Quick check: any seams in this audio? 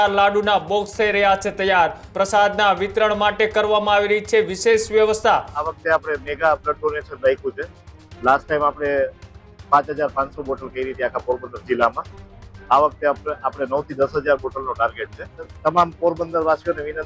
yes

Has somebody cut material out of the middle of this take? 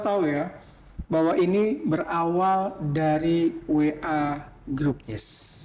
no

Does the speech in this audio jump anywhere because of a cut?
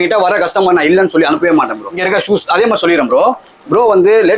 no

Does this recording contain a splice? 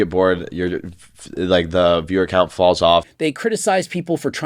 yes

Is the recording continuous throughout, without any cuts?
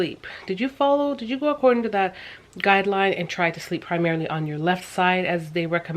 yes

